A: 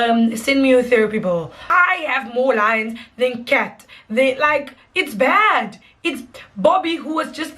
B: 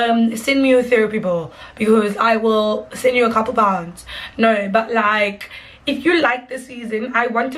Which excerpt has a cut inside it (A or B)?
A